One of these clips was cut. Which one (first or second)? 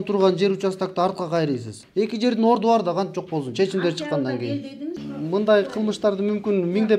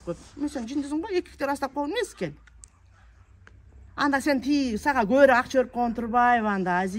first